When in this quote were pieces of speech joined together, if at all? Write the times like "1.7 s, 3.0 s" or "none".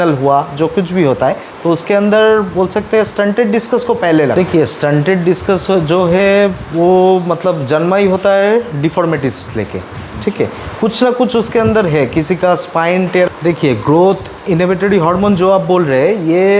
4.3 s, 13.3 s